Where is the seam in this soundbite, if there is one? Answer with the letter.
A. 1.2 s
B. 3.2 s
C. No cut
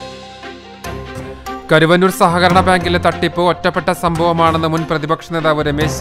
A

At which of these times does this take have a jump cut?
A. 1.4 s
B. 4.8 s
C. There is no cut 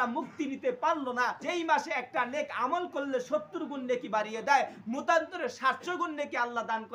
A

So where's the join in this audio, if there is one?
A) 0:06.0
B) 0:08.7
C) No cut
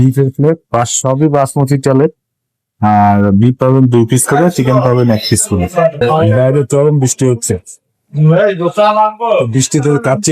A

